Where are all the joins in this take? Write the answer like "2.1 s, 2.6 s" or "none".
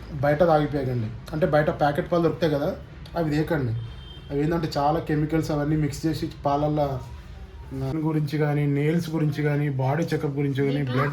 7.9 s